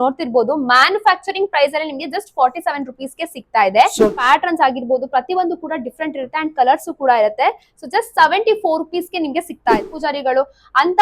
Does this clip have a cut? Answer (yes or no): yes